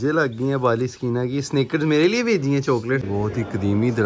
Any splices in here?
yes; 1 cut; at 3.0 s

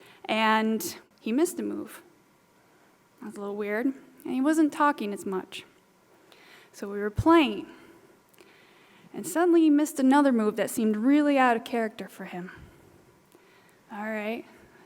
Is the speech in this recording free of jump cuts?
no; 1 cut; at 1.0 s

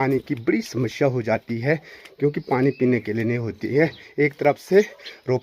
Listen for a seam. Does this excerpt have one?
no; 0 cuts

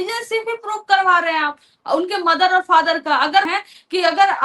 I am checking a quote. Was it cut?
yes; 1 cut; at 3.5 s

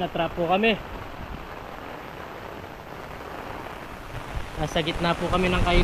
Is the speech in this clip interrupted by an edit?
no; 0 cuts

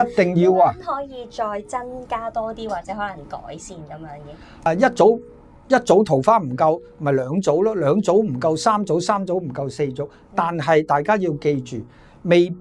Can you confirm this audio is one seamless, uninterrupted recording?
no; 1 cut; at 4.7 s

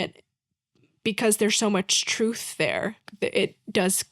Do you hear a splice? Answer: yes; 1 cut; at 3.1 s

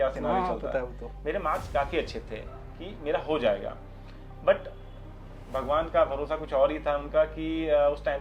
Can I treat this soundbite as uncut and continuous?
yes; 0 cuts

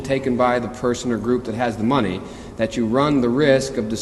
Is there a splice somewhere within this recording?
no; 0 cuts

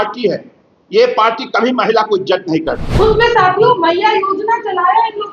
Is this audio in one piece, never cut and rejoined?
no; 1 cut; at 2.9 s

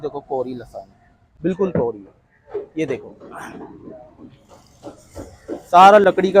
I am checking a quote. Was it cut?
no; 0 cuts

